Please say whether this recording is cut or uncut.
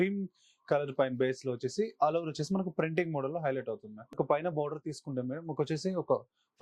cut